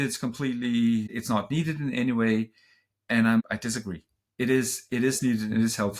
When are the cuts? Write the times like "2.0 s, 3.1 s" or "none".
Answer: 1.2 s, 3.4 s